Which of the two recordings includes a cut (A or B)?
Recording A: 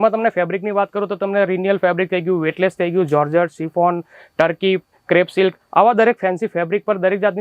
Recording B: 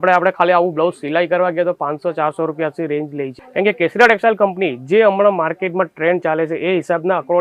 B